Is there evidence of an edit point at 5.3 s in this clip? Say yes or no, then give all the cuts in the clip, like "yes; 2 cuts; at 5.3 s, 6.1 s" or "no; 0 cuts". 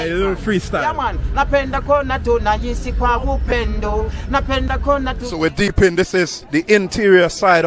yes; 1 cut; at 5.3 s